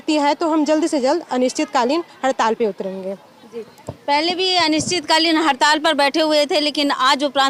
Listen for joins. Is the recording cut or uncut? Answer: uncut